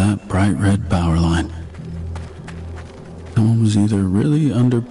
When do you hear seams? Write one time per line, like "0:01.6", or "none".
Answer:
0:01.6
0:03.3